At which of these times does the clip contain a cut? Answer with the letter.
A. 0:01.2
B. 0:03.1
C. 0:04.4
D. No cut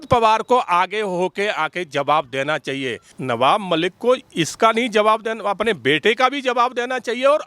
B